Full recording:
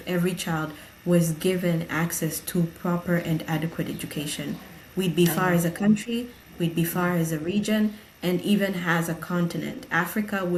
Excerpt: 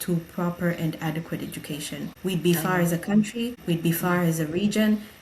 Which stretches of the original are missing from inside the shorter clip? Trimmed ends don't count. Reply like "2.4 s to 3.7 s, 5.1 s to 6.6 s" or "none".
4.6 s to 4.9 s, 6.3 s to 6.5 s

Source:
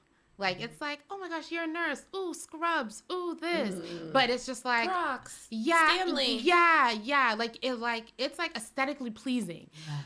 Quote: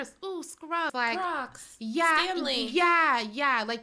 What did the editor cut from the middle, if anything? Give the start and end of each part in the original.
2.8 s to 4.6 s

